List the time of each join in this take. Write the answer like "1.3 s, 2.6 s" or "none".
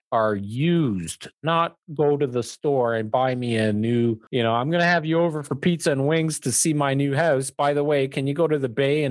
4.2 s